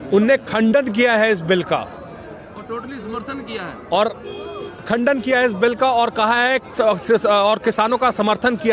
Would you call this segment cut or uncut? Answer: uncut